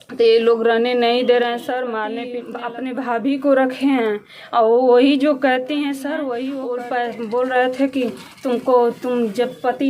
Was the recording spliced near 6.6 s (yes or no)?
yes